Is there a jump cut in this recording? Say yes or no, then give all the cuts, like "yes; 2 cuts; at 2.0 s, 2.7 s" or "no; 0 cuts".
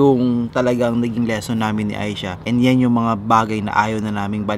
no; 0 cuts